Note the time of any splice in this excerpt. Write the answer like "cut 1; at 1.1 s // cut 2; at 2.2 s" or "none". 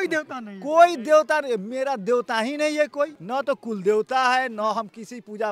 cut 1; at 3.2 s